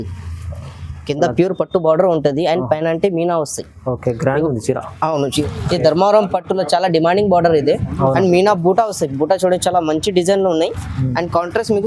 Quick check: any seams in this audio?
yes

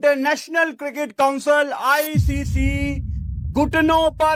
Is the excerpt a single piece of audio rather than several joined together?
yes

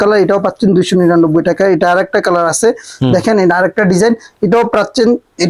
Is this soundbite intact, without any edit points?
yes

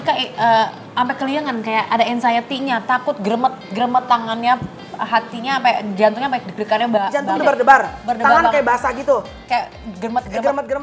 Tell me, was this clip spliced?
no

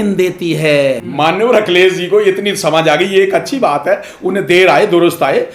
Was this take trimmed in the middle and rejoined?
yes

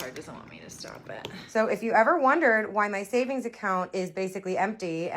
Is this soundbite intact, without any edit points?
no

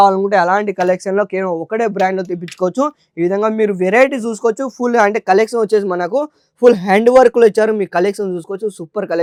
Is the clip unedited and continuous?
yes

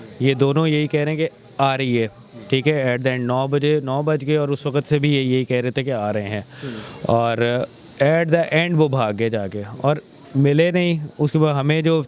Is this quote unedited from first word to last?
yes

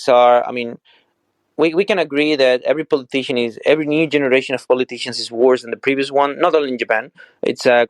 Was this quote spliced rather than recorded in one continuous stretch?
no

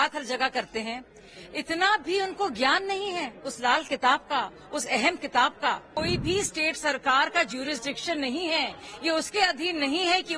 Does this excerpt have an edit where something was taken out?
yes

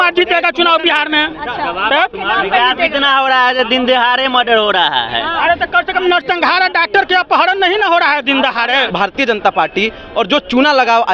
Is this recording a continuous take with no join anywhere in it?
no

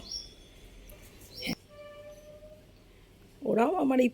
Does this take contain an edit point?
yes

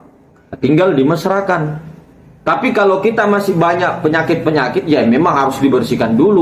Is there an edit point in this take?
no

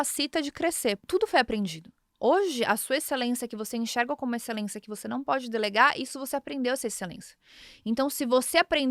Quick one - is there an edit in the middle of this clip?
yes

